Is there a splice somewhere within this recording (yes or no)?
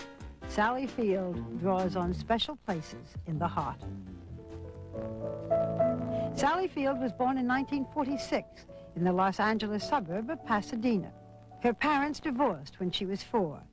no